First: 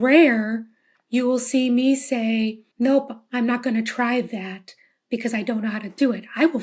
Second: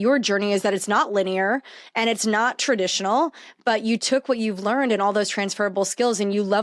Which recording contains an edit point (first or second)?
first